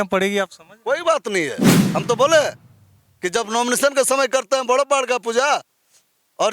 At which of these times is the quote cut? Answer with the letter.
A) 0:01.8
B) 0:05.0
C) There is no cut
A